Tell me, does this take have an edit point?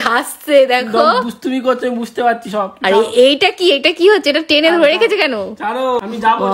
no; 0 cuts

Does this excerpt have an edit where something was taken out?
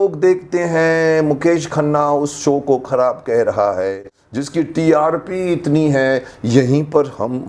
no; 0 cuts

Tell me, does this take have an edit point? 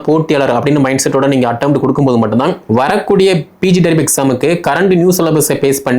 yes; 1 cut; at 2.6 s

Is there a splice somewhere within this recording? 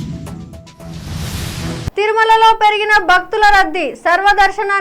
yes; 1 cut; at 1.9 s

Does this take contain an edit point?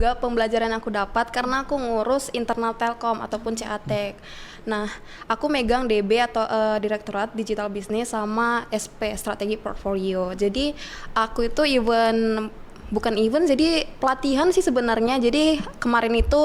no; 0 cuts

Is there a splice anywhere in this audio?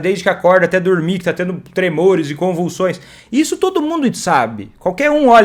no; 0 cuts

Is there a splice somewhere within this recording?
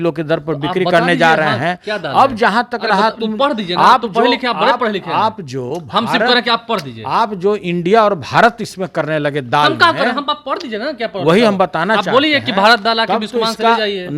no; 0 cuts

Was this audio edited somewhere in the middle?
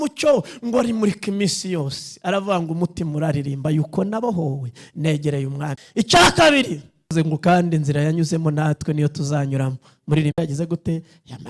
yes; 1 cut; at 7.1 s

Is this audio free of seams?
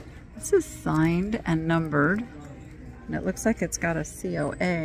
yes; 0 cuts

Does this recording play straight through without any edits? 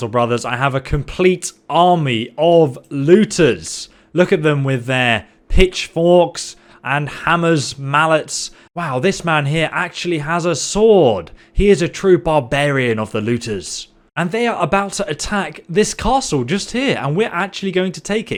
yes; 0 cuts

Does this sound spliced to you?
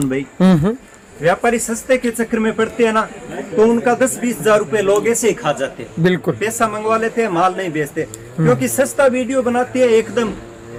no; 0 cuts

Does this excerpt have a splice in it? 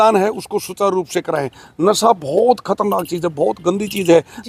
no; 0 cuts

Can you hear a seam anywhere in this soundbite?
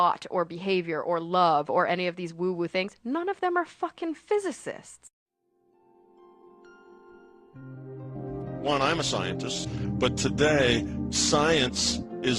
no; 0 cuts

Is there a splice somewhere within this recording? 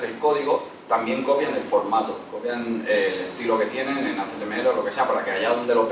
no; 0 cuts

